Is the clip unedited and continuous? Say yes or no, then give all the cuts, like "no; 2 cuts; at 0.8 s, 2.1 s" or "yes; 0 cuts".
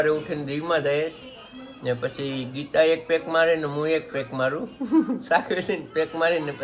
yes; 0 cuts